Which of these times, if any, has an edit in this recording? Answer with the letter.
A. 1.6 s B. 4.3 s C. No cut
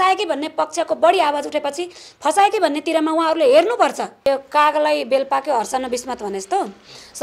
B